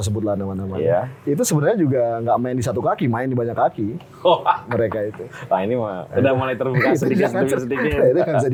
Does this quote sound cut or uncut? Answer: uncut